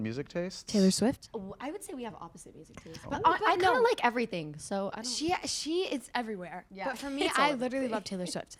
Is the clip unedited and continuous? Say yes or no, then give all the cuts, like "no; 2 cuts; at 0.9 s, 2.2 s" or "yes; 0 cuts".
yes; 0 cuts